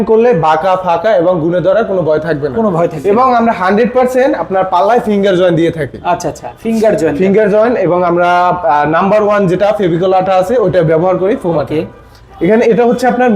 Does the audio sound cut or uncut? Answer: uncut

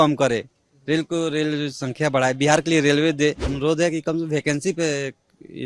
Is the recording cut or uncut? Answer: cut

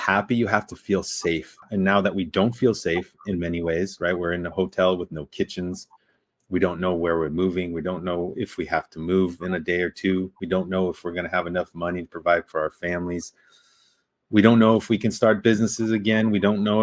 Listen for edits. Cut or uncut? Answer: cut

